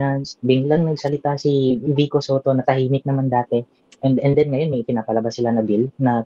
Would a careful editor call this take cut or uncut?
uncut